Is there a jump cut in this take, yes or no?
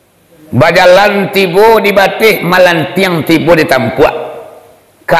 no